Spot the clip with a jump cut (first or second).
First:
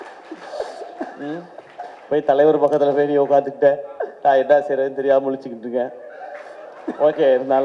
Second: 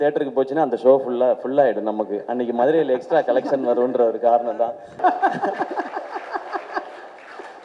second